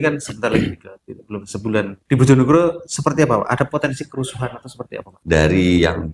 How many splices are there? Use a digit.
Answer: 2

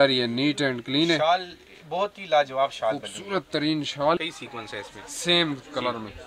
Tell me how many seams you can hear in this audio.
1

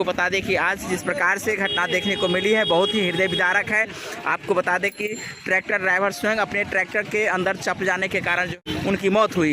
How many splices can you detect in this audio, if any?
1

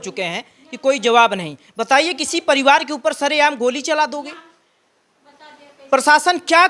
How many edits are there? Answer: 0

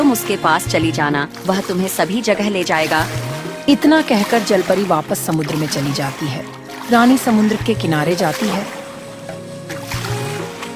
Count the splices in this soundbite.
0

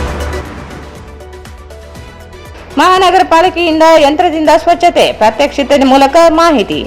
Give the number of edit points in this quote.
1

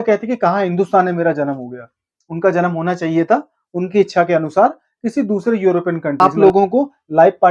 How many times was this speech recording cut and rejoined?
1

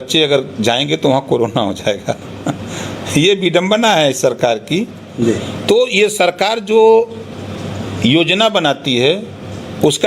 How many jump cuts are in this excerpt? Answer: 0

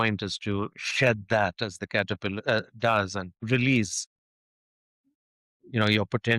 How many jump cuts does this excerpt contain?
1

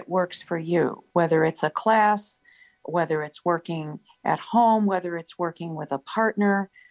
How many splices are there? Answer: 1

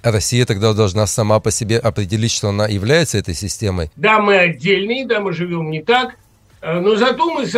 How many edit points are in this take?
1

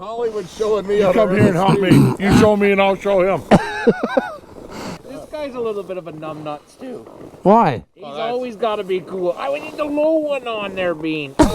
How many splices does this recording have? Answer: 1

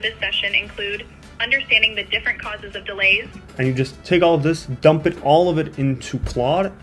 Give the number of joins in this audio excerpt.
1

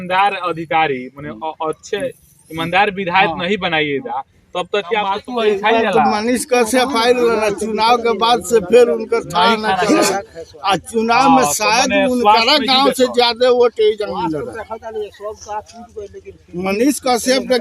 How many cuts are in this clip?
1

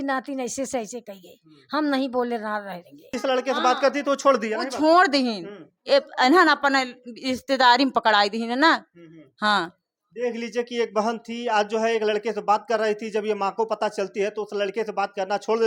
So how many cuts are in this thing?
1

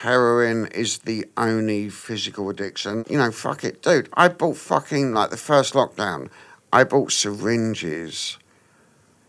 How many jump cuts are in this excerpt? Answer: 1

